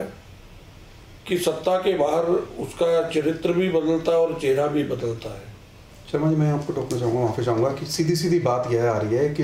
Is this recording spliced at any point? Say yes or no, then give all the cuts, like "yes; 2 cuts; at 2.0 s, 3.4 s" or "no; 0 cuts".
no; 0 cuts